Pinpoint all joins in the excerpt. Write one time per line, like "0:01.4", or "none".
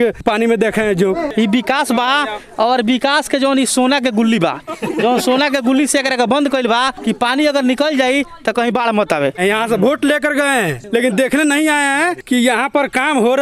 0:01.3
0:09.4